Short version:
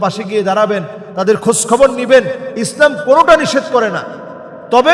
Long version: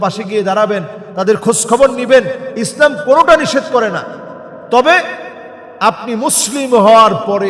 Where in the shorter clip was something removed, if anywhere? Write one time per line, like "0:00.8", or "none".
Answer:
none